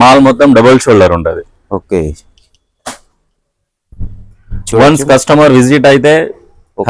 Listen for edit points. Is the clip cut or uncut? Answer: uncut